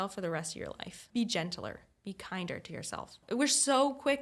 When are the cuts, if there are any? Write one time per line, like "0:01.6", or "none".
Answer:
0:01.0
0:03.2